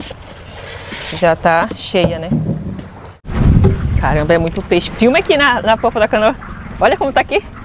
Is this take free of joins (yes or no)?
no